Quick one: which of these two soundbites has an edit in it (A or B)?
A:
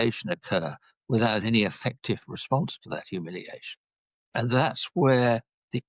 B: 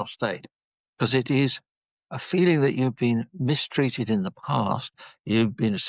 B